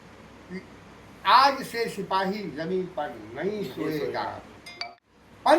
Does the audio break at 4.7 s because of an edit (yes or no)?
yes